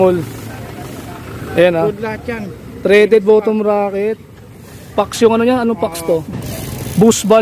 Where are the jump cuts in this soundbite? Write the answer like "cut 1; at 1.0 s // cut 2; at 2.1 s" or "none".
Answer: cut 1; at 6.3 s